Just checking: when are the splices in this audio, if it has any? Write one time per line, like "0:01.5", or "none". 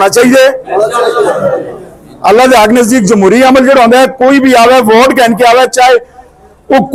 none